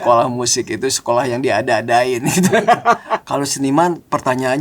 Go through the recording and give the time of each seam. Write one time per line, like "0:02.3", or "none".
0:03.1